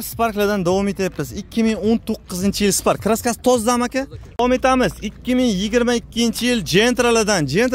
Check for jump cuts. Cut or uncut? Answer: cut